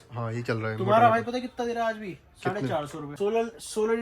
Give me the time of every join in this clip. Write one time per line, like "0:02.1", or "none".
0:03.0